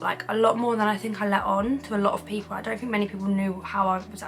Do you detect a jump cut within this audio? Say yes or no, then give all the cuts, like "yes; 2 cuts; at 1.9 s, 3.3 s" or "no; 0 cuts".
no; 0 cuts